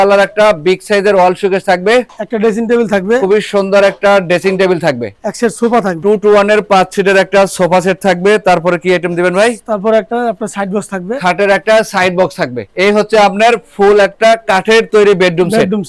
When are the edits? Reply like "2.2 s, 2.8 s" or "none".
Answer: none